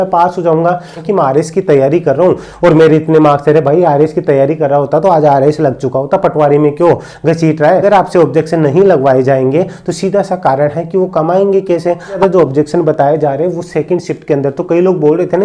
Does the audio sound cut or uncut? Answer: cut